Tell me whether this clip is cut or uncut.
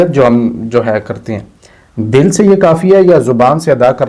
uncut